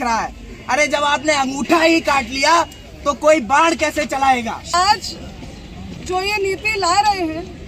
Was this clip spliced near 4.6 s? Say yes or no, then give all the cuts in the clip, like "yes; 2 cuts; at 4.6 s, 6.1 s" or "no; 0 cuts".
no; 0 cuts